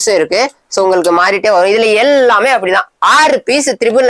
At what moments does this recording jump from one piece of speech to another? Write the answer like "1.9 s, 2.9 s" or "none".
none